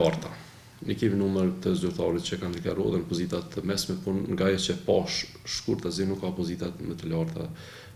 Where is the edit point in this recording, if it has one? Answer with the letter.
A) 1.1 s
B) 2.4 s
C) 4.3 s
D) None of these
D